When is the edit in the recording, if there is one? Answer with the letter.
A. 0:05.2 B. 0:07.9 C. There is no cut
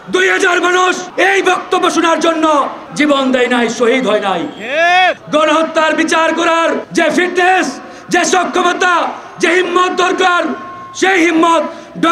A